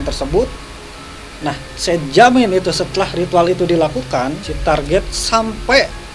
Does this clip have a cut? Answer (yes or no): yes